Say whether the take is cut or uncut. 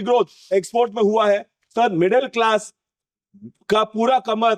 uncut